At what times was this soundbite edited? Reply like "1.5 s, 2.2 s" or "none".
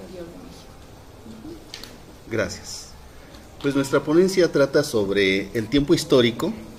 none